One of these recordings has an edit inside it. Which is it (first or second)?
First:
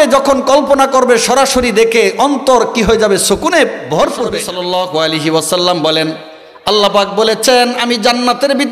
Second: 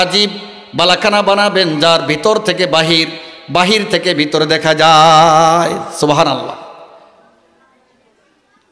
first